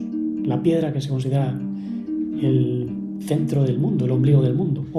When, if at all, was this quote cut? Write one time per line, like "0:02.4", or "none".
none